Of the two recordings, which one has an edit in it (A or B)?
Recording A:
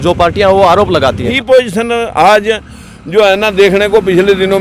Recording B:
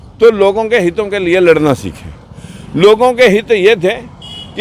A